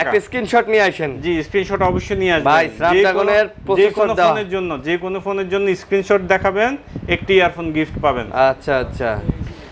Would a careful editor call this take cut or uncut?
uncut